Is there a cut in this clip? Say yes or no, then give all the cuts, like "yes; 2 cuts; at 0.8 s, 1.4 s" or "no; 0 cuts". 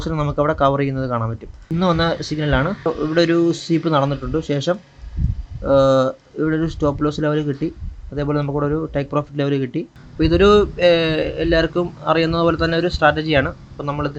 yes; 3 cuts; at 1.7 s, 2.9 s, 10.0 s